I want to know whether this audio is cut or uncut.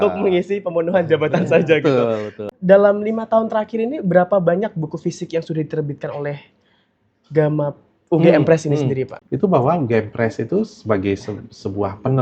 cut